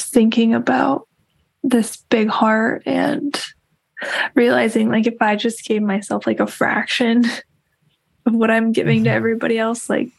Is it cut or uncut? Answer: uncut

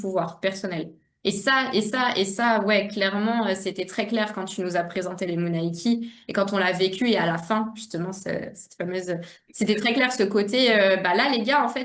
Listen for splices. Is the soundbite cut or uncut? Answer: uncut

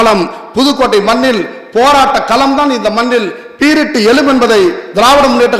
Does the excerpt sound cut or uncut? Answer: uncut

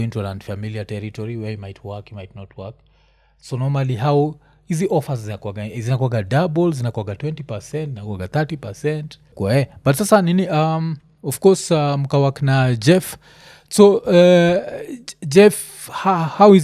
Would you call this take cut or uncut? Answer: cut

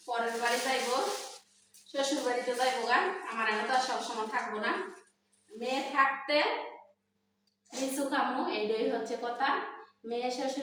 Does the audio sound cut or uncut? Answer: uncut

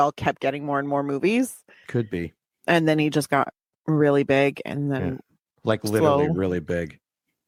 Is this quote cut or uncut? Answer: uncut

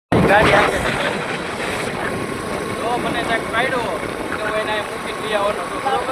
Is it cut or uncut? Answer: uncut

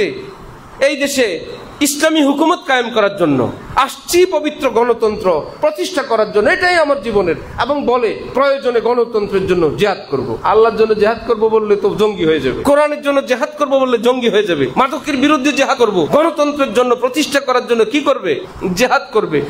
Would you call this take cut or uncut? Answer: cut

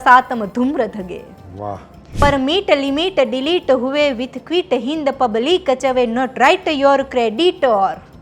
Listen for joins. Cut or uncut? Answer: cut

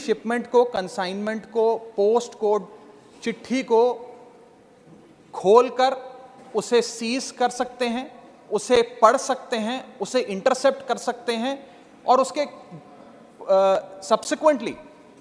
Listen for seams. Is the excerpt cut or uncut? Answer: uncut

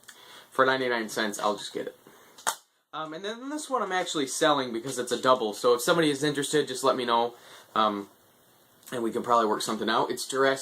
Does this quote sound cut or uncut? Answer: uncut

